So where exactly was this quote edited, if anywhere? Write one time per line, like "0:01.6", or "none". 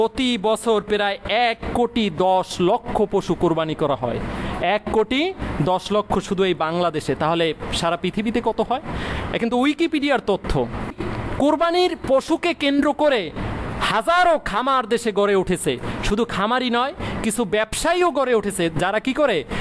0:11.0